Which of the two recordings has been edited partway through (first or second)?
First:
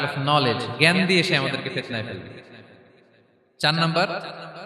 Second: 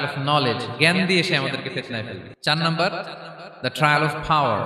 second